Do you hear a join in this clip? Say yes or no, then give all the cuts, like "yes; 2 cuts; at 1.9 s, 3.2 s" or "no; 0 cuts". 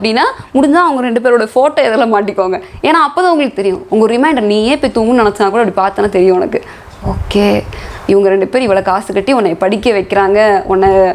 no; 0 cuts